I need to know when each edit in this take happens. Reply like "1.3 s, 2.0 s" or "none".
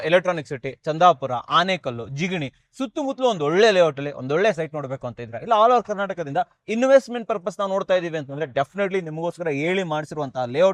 none

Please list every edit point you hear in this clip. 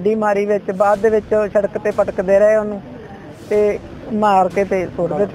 none

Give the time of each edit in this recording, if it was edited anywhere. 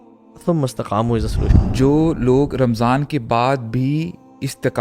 1.5 s

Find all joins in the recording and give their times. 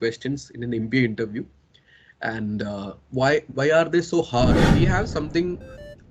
4.7 s

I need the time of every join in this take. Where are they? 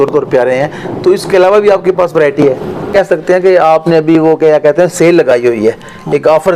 2.9 s

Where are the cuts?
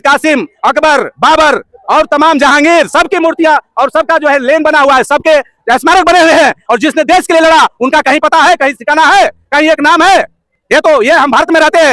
none

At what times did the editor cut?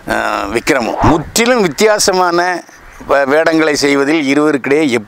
0.9 s

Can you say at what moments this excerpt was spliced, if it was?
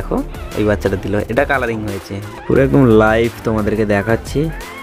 2.2 s

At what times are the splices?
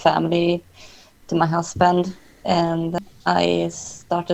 3.0 s

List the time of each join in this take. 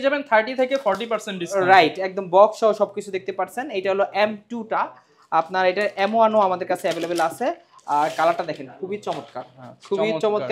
none

